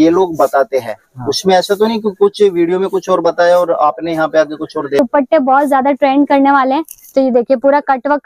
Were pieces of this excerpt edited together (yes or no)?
yes